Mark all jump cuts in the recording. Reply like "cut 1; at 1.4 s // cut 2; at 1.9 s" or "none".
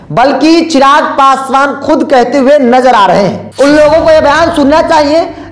cut 1; at 3.4 s